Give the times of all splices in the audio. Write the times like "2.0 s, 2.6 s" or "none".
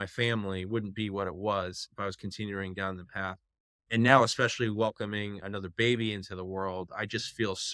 none